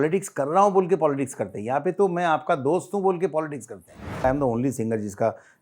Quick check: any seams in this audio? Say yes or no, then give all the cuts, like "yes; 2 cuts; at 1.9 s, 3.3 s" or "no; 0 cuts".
yes; 1 cut; at 4.2 s